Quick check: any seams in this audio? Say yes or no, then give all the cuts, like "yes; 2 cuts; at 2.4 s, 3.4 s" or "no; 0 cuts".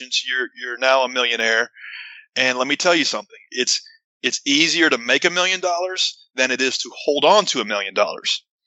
no; 0 cuts